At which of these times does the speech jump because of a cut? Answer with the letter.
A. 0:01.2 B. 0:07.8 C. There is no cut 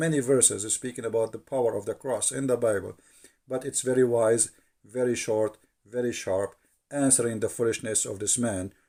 C